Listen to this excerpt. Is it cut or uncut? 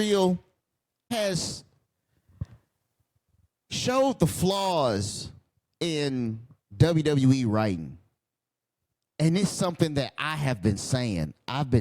cut